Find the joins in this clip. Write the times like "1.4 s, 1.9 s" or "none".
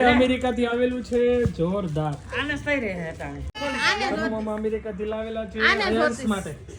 3.6 s